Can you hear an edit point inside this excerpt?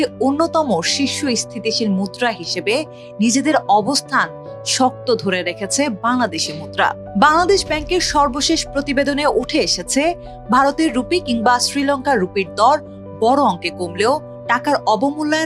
no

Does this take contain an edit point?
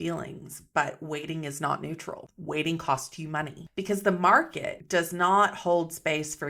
yes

